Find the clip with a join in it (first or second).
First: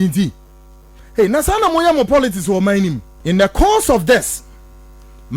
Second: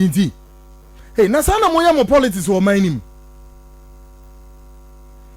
first